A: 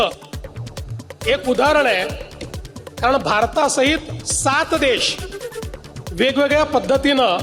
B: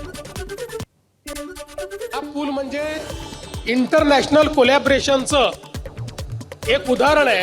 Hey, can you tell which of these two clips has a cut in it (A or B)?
B